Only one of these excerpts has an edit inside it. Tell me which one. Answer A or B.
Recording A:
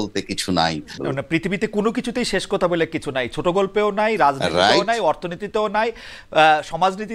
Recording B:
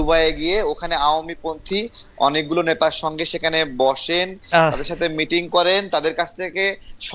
A